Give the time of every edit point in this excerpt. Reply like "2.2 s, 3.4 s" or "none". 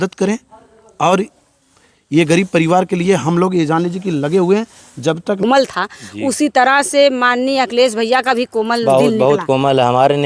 5.4 s